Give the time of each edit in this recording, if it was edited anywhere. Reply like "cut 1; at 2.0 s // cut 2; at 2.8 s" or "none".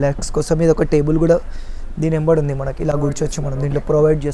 none